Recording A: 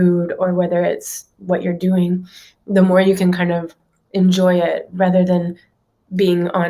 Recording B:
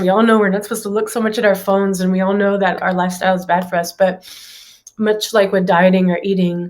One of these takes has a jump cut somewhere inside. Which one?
B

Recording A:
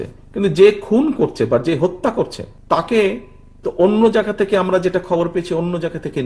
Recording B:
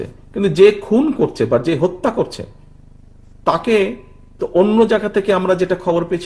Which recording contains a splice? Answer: A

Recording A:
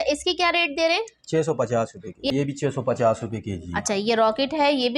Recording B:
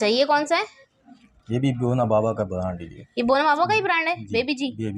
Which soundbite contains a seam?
A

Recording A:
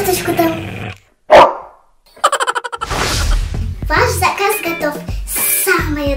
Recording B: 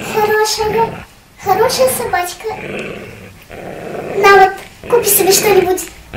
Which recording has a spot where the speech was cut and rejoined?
A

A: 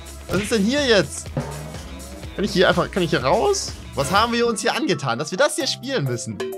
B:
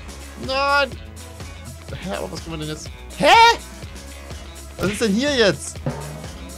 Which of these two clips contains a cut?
A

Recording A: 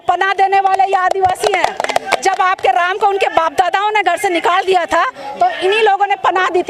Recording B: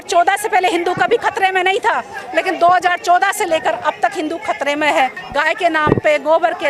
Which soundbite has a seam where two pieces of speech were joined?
B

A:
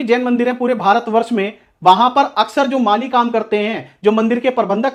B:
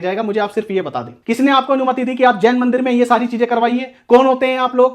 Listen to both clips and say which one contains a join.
B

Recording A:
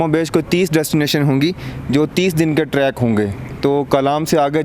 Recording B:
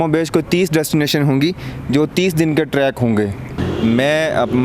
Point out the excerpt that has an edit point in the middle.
B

